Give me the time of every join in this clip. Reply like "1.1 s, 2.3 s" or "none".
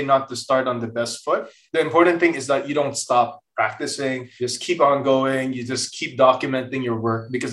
1.6 s, 4.3 s